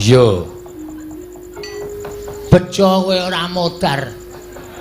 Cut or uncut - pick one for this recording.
cut